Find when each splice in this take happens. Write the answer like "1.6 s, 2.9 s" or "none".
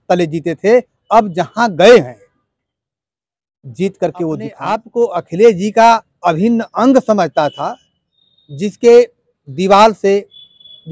4.8 s